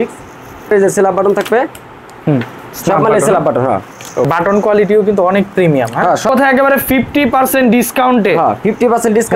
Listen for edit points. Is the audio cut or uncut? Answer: cut